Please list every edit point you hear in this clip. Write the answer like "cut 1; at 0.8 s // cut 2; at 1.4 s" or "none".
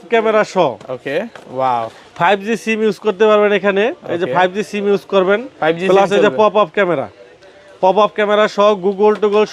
none